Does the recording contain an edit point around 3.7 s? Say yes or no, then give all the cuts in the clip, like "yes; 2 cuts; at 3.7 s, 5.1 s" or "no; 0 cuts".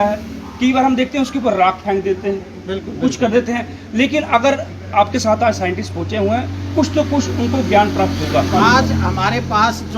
no; 1 cut; at 8.5 s